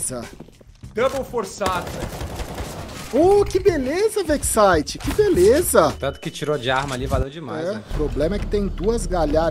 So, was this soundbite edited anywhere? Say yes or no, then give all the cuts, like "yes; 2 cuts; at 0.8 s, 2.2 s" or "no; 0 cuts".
yes; 1 cut; at 7.9 s